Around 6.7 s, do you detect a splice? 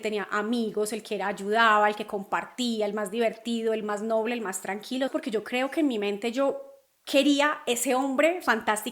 no; 1 cut; at 5.1 s

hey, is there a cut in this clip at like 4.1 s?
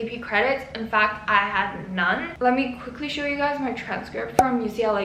no; 1 cut; at 2.4 s

